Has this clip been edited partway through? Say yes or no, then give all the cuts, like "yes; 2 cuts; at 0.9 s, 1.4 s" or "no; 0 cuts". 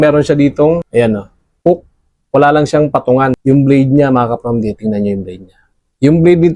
yes; 1 cut; at 3.4 s